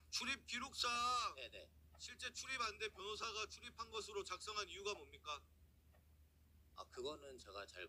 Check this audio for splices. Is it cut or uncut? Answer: uncut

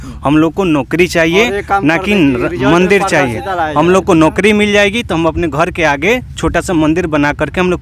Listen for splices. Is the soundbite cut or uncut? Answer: uncut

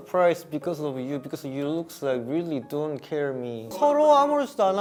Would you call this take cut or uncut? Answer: uncut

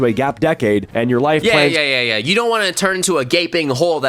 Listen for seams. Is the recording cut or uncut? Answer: uncut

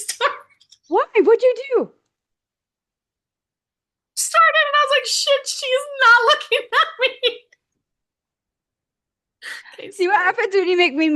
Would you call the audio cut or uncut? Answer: uncut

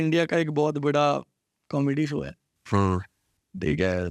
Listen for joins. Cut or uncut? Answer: uncut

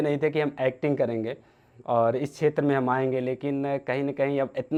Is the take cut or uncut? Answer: uncut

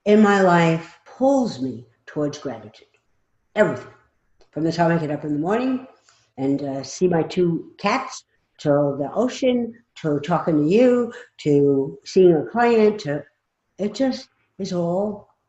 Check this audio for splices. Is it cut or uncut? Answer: cut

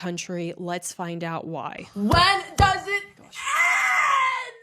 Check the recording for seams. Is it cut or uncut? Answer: cut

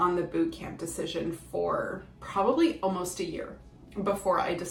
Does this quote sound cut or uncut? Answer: uncut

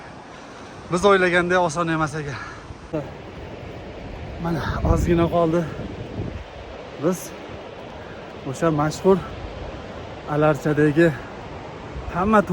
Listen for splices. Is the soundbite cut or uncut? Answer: cut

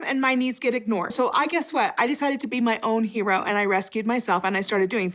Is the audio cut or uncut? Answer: cut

